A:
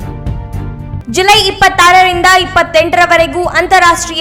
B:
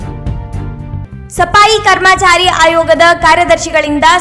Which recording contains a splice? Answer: B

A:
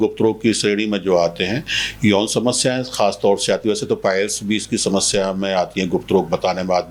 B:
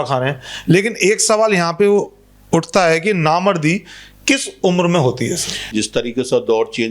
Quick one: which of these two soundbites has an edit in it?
B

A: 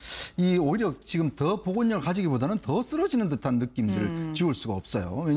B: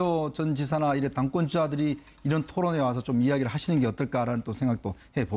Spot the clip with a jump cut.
B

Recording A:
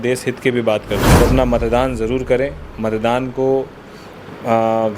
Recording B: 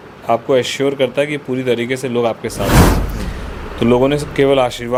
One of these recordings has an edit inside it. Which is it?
A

